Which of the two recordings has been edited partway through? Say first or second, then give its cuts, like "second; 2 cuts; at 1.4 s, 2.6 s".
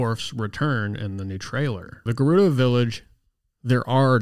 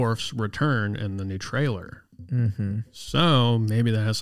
first; 1 cut; at 2.1 s